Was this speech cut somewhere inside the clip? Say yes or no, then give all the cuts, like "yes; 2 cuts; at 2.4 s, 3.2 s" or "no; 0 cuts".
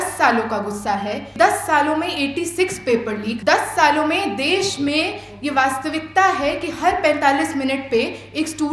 yes; 2 cuts; at 1.2 s, 3.4 s